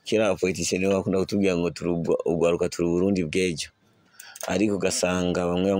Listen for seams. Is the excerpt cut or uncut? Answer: uncut